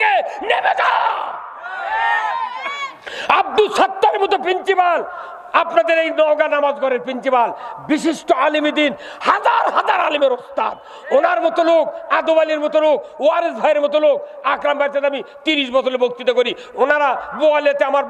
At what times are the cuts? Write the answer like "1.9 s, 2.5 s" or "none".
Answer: none